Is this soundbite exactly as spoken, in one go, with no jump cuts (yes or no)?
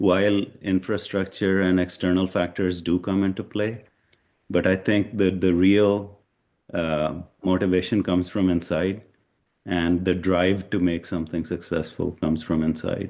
yes